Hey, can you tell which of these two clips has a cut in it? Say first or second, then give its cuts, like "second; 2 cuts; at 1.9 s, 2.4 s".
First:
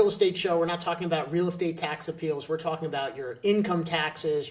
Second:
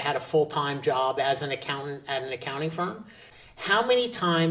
second; 1 cut; at 3.2 s